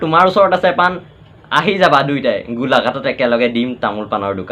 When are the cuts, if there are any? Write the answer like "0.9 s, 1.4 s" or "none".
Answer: none